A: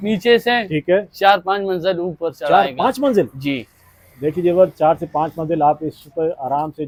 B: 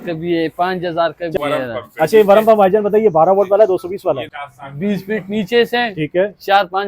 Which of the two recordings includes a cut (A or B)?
B